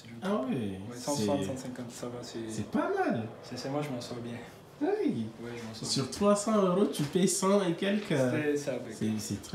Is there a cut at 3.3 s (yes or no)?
no